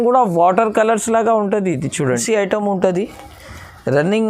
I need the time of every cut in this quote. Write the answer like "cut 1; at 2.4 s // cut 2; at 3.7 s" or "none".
cut 1; at 2.2 s